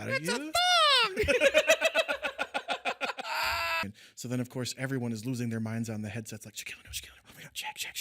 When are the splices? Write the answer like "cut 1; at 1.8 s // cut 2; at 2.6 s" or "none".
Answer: cut 1; at 3.8 s